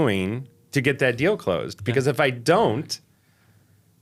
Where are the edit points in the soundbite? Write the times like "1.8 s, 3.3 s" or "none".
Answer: none